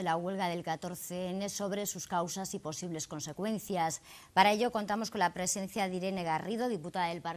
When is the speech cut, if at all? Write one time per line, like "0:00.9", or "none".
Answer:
none